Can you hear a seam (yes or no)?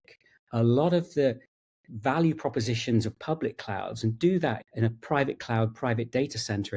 no